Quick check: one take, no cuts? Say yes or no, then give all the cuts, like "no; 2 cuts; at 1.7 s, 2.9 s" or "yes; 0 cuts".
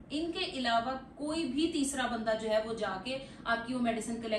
yes; 0 cuts